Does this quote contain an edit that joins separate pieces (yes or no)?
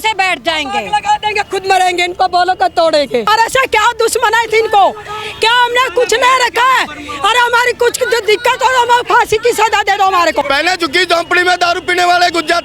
yes